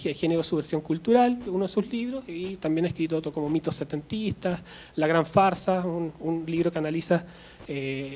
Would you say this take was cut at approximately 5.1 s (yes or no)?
no